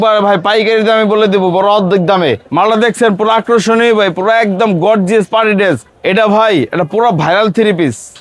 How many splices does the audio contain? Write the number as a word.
two